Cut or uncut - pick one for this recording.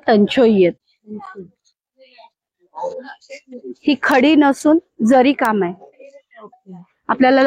cut